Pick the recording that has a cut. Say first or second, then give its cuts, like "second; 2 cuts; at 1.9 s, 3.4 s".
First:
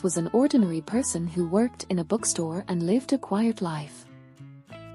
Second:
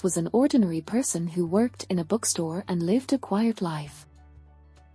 first; 1 cut; at 3.9 s